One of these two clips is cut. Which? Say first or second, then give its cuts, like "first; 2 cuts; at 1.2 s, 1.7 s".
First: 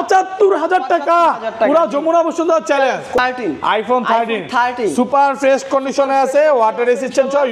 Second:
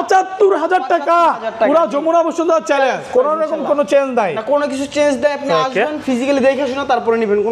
first; 1 cut; at 3.2 s